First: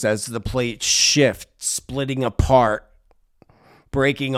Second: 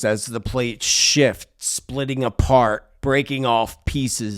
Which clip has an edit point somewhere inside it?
second; 1 cut; at 2.9 s

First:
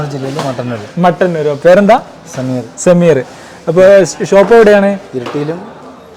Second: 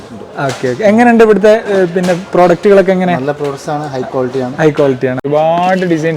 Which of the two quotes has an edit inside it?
second; 1 cut; at 5.3 s

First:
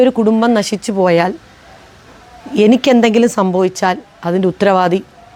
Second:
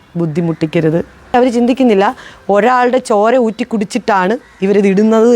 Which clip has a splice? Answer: second; 1 cut; at 1.3 s

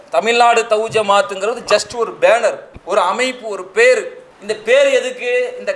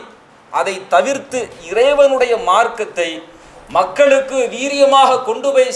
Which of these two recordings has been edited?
first; 1 cut; at 2.7 s

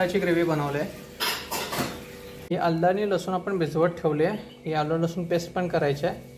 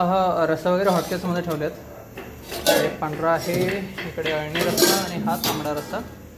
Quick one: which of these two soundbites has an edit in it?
first; 1 cut; at 2.5 s

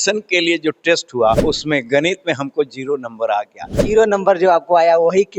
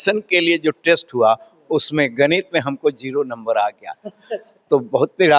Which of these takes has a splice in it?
first; 2 cuts; at 1.4 s, 3.8 s

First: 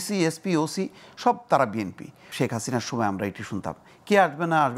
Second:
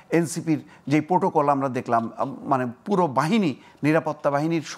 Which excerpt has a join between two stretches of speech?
first; 1 cut; at 2.2 s

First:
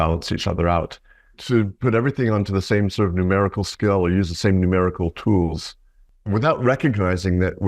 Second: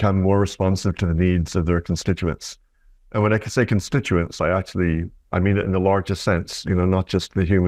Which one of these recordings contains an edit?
first; 2 cuts; at 1.4 s, 6.1 s

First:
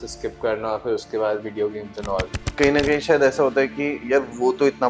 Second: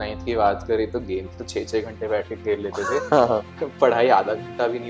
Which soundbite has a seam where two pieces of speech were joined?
first; 1 cut; at 2.5 s

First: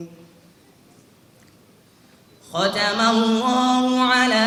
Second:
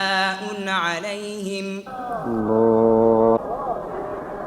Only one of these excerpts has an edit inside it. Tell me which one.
second; 1 cut; at 2.1 s

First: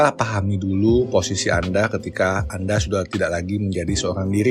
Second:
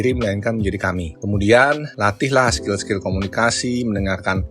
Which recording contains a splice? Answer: second; 2 cuts; at 1.2 s, 1.9 s

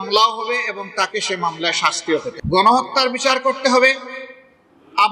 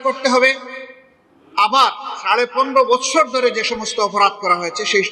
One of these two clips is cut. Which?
first; 1 cut; at 2.4 s

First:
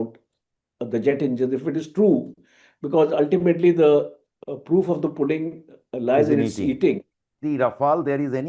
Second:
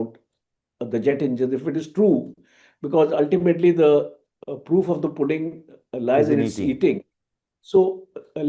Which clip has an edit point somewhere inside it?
first; 1 cut; at 7.3 s

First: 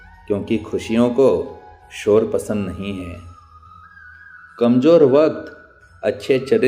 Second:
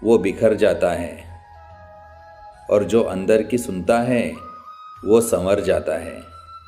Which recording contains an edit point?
second; 2 cuts; at 1.2 s, 2.5 s

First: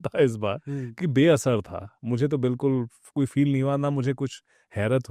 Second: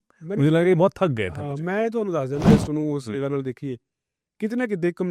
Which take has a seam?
second; 1 cut; at 2.5 s

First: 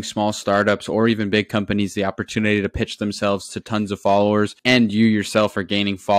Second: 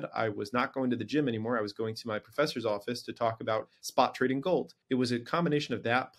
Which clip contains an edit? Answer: second; 1 cut; at 4.8 s

